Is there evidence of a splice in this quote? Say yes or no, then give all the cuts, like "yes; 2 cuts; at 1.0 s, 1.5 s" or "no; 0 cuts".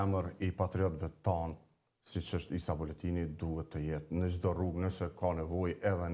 no; 0 cuts